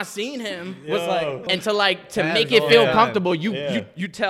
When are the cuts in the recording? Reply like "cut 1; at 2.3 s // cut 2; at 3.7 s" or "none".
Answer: cut 1; at 1.4 s